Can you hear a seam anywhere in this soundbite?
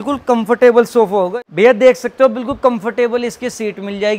yes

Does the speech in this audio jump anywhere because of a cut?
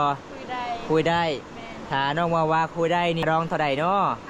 yes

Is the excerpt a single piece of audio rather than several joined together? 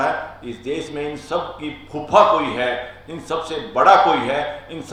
yes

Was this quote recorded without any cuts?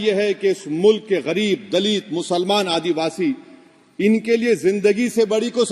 yes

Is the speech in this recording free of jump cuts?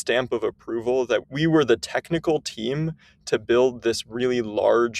no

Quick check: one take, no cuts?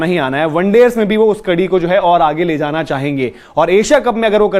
yes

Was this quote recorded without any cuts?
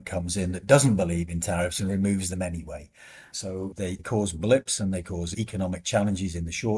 no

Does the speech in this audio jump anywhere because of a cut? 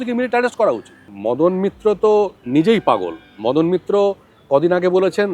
yes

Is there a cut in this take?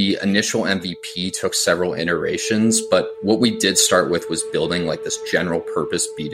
no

